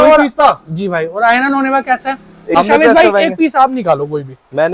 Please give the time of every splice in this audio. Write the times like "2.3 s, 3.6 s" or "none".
2.6 s